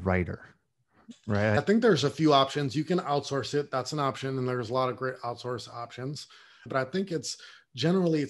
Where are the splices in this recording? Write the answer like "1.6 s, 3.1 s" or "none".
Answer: 1.6 s, 6.7 s